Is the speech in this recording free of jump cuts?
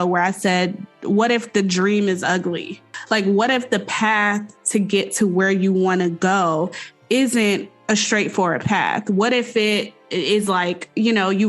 no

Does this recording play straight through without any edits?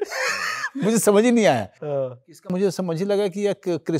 no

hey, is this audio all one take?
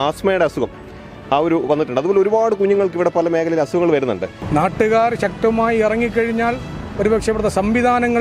no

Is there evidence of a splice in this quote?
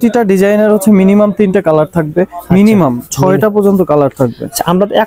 no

